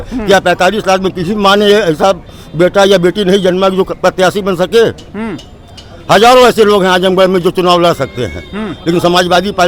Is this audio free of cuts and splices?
yes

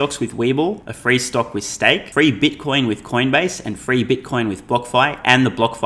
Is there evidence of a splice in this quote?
yes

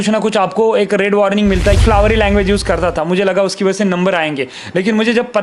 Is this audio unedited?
no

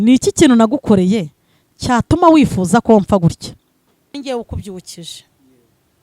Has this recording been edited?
yes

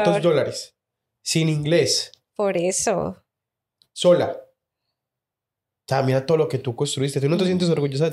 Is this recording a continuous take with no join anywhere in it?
yes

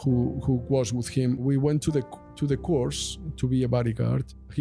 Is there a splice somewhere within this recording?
no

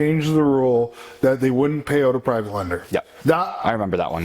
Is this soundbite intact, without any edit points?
no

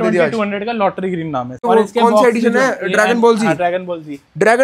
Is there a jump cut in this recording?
yes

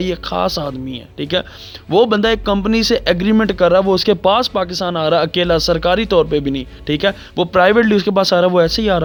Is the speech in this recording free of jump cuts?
yes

